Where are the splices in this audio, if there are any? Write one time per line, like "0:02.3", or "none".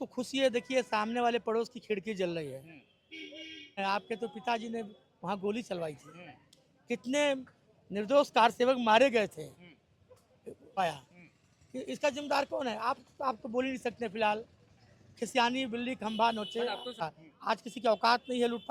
0:03.8
0:10.8
0:17.1